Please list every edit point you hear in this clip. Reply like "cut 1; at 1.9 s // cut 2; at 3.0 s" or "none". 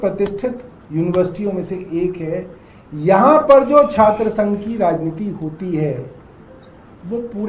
none